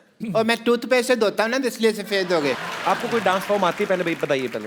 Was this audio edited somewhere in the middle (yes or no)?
yes